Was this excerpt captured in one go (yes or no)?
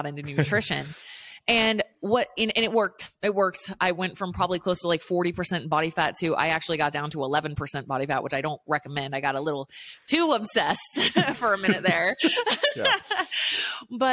yes